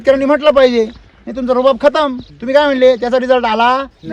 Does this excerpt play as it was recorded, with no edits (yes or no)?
no